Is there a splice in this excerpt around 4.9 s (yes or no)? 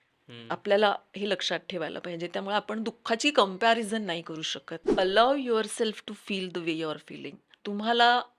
yes